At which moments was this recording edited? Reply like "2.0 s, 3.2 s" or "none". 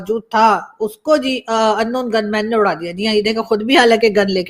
none